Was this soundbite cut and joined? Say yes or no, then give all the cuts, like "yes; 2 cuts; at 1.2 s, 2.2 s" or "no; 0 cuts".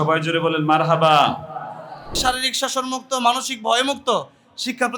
yes; 1 cut; at 2.1 s